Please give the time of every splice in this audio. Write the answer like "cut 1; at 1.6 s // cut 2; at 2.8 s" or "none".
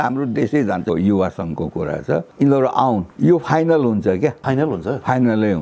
cut 1; at 0.9 s // cut 2; at 2.3 s // cut 3; at 3.1 s // cut 4; at 4.4 s